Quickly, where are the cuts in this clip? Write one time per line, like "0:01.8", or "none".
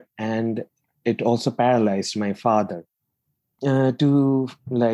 0:03.4